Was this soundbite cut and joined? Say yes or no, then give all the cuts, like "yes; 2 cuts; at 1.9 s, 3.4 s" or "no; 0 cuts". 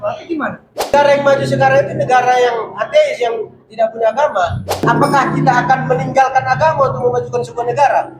yes; 2 cuts; at 0.9 s, 4.8 s